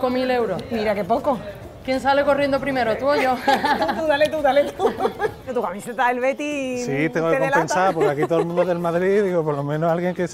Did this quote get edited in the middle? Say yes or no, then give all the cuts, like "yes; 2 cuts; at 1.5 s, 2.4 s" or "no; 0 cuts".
yes; 1 cut; at 5.5 s